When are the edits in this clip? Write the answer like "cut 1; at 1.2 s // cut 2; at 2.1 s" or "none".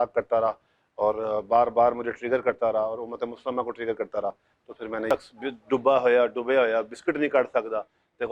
cut 1; at 5.1 s